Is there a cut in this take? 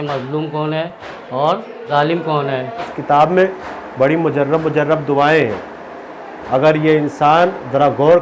yes; 2 cuts; at 1.4 s, 2.9 s

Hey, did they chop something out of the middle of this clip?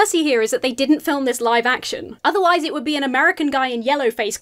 no; 0 cuts

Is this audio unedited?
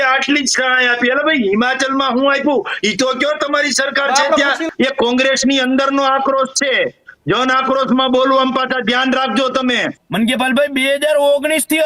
no; 2 cuts; at 4.6 s, 10.0 s

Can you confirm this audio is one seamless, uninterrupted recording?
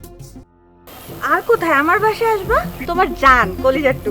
no; 1 cut; at 2.8 s

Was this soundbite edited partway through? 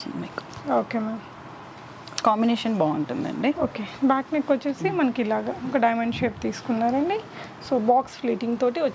no; 0 cuts

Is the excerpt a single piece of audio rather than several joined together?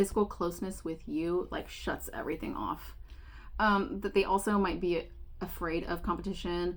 yes; 0 cuts

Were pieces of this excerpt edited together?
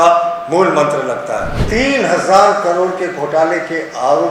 yes; 1 cut; at 1.5 s

